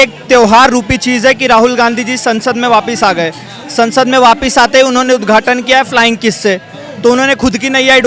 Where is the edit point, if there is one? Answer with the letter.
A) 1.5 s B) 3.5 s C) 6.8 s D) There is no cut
D